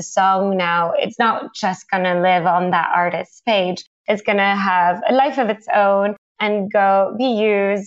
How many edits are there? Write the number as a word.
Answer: one